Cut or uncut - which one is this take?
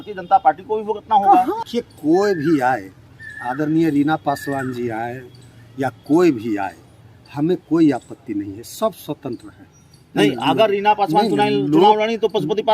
cut